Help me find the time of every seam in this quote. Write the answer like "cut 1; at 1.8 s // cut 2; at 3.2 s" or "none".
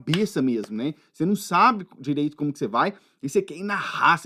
none